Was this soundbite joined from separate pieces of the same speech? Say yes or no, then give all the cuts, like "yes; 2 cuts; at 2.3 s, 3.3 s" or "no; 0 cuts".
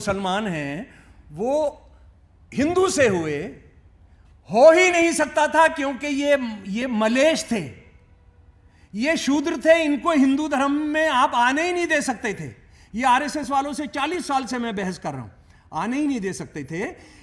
no; 0 cuts